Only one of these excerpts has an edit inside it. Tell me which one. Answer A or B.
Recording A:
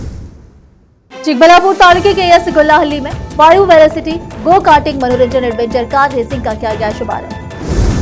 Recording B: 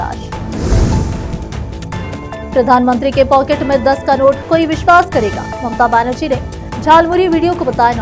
A